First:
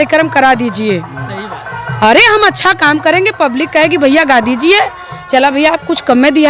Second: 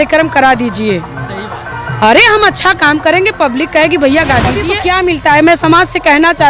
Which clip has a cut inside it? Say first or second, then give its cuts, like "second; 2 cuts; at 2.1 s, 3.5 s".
second; 1 cut; at 4.7 s